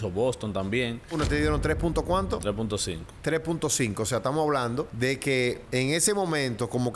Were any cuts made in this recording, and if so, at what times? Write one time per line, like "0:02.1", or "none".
0:01.2
0:04.9
0:05.6